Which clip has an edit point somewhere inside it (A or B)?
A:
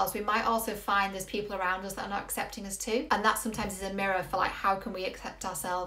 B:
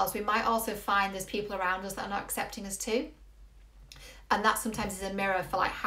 A